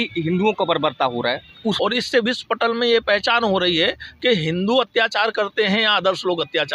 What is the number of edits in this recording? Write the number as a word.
one